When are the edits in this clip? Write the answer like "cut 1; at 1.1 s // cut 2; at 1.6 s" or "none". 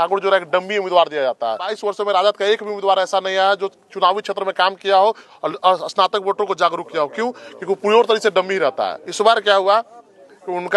cut 1; at 1.7 s // cut 2; at 9.0 s